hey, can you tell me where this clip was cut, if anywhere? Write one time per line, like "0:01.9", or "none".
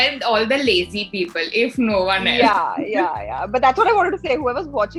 none